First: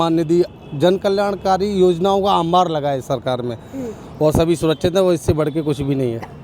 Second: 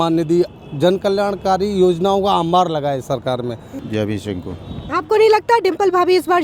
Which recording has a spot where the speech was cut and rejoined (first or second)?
second